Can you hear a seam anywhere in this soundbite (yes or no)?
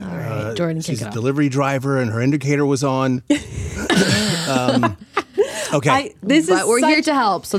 no